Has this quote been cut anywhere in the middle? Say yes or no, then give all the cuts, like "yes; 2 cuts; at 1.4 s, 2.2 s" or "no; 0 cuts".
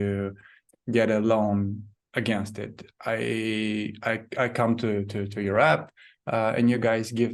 no; 0 cuts